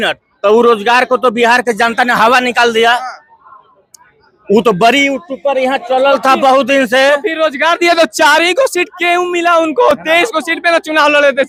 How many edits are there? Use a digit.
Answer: 0